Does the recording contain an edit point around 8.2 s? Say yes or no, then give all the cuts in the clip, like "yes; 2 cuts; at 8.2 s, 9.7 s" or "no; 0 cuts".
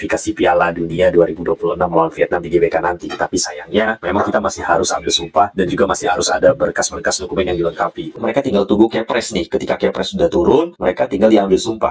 yes; 1 cut; at 8.2 s